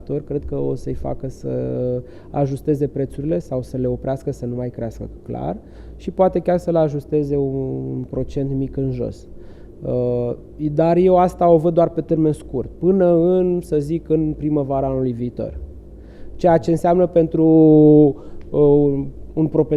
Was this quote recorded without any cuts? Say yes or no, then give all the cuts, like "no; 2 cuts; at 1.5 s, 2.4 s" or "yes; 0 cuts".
yes; 0 cuts